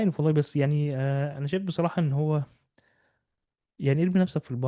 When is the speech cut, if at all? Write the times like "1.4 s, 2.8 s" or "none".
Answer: none